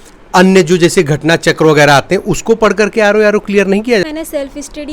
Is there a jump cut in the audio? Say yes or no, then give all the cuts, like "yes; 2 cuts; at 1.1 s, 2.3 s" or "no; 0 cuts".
yes; 1 cut; at 4.0 s